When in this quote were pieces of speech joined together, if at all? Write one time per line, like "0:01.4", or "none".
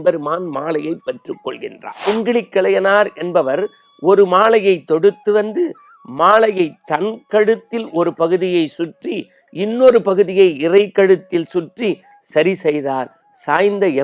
0:01.9